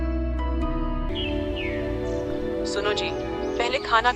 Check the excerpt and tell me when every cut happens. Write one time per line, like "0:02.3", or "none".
0:01.1